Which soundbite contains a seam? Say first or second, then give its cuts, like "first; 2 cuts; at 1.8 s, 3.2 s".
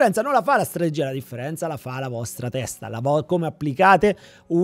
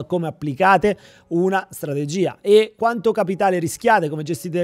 second; 1 cut; at 2.7 s